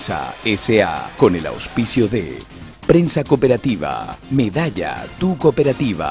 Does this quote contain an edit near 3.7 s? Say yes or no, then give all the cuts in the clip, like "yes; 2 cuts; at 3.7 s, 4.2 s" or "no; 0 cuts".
no; 1 cut; at 1.1 s